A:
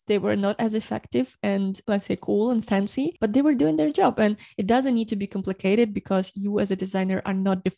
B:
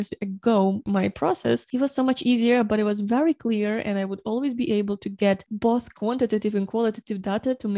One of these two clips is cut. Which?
B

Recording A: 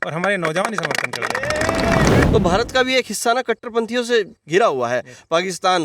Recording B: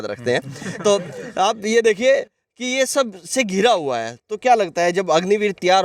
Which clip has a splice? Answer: A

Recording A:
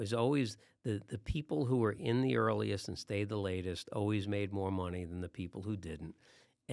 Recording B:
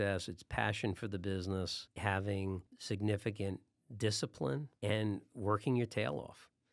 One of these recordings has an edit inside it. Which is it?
B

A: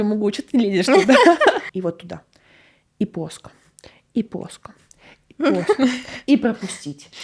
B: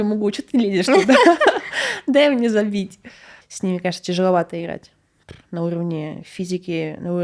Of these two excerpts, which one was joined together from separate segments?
A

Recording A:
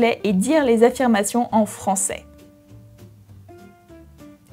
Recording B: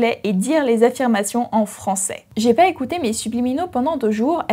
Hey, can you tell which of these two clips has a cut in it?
B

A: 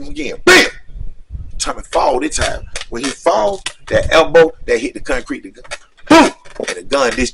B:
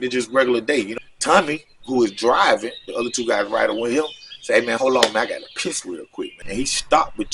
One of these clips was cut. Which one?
B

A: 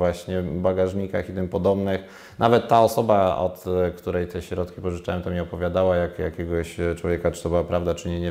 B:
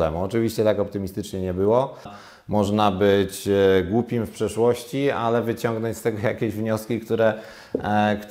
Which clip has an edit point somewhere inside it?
B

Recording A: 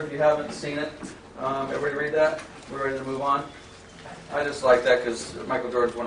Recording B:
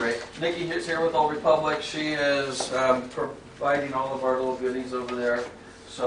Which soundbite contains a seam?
B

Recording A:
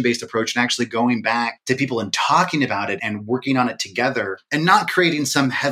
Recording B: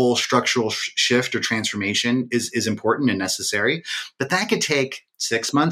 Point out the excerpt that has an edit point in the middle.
A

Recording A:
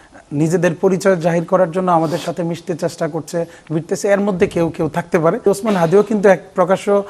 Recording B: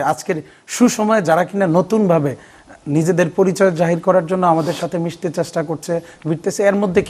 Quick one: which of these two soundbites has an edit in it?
A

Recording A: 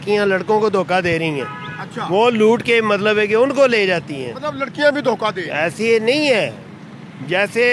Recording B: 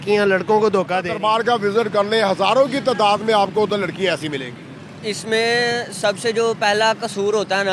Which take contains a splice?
B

